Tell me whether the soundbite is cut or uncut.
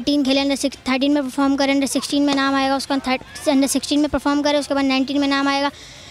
uncut